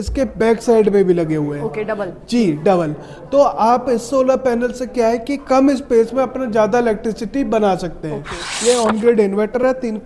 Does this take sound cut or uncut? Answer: cut